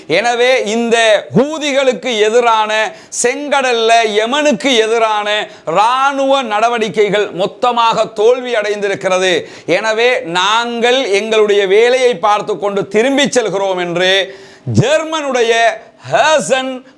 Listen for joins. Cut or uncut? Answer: uncut